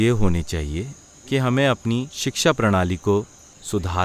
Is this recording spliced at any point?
no; 0 cuts

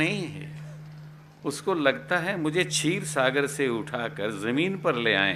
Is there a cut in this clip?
no; 0 cuts

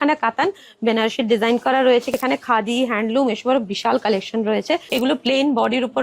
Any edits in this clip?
yes; 2 cuts; at 2.1 s, 4.8 s

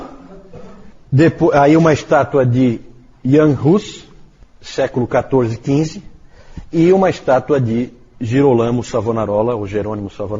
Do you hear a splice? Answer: yes; 1 cut; at 6.8 s

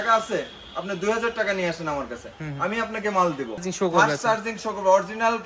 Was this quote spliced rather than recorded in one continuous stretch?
yes; 1 cut; at 3.7 s

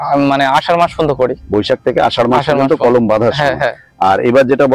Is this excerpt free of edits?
yes; 0 cuts

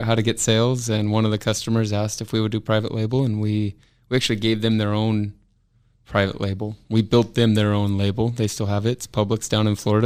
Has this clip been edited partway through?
no; 0 cuts

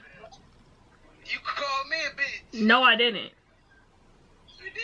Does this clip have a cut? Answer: no; 0 cuts

